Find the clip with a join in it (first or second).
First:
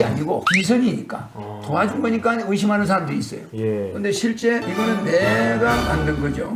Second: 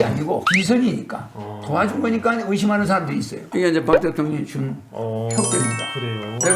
second